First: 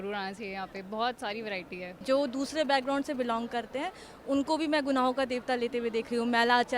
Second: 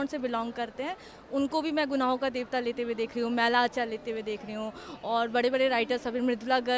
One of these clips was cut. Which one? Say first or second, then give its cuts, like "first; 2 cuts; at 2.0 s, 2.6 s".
first; 1 cut; at 2.0 s